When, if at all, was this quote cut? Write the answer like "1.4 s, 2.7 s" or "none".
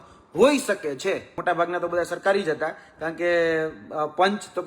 1.4 s